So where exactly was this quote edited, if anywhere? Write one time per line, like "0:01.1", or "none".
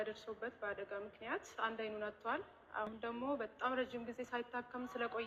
none